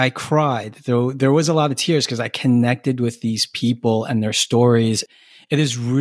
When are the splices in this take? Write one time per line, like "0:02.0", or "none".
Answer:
0:05.1